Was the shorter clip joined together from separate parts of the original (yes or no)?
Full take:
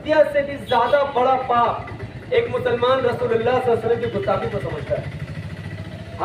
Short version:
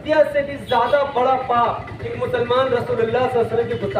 yes